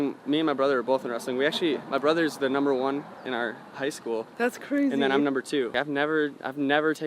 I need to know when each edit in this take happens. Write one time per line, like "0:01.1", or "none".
0:05.8